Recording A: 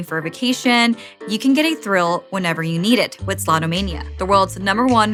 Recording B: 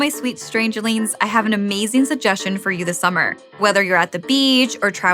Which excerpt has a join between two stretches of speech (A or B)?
B